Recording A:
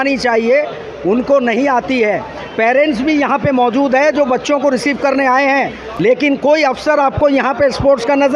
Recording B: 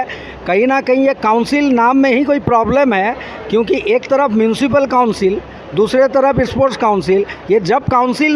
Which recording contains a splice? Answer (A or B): A